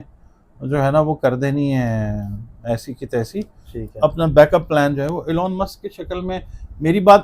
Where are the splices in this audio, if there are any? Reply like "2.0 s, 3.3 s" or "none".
none

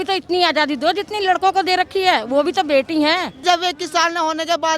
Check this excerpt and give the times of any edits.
3.4 s

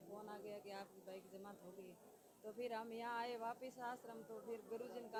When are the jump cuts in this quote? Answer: none

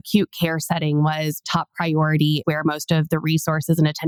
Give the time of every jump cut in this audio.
none

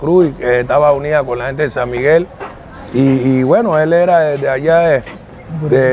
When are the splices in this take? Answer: none

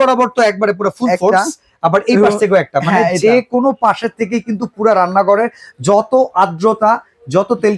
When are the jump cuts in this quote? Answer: none

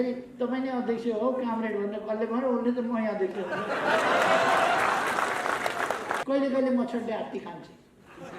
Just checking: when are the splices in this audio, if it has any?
6.2 s

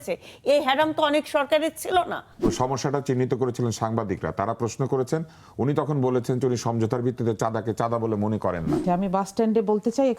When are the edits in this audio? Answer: 8.8 s

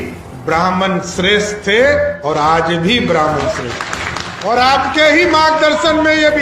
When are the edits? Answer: 4.3 s

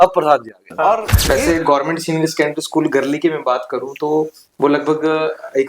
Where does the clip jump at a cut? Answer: 1.1 s

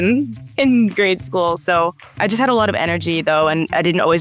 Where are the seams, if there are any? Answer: none

